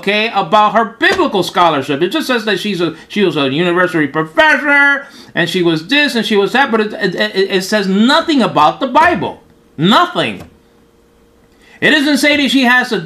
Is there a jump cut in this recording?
no; 0 cuts

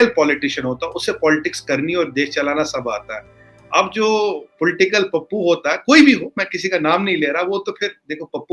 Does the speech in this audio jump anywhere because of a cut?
no; 0 cuts

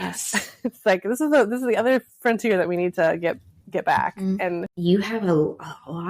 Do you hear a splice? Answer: yes; 1 cut; at 4.7 s

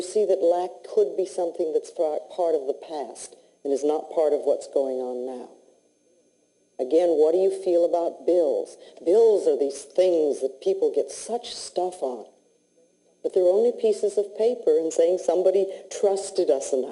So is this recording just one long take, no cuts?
yes; 0 cuts

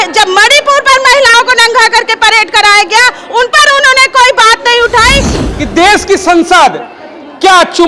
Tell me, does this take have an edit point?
yes; 1 cut; at 5.3 s

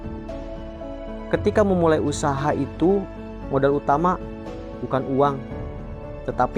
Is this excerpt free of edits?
no; 1 cut; at 1.2 s

